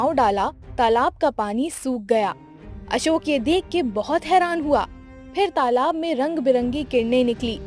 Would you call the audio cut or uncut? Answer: uncut